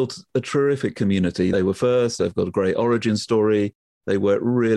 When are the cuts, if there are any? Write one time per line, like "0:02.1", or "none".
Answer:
none

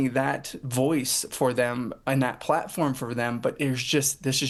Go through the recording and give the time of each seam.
none

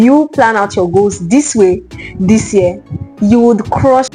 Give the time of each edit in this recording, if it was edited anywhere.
none

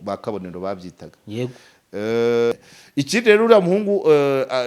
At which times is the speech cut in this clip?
0:02.7

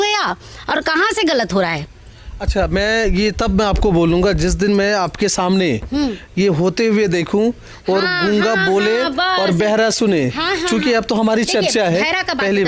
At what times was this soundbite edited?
none

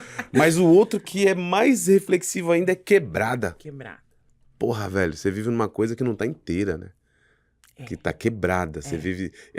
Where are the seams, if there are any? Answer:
none

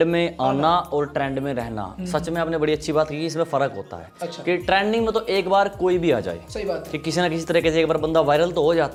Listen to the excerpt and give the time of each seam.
none

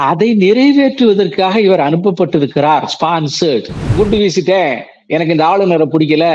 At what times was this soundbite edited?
0:03.9

